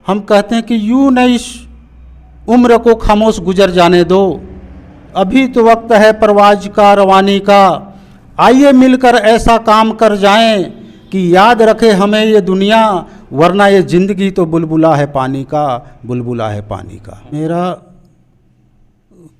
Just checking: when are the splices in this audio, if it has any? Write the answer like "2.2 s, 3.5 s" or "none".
17.3 s